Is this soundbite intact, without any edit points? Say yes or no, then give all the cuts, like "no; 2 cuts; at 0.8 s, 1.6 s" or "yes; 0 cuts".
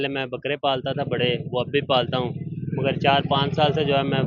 yes; 0 cuts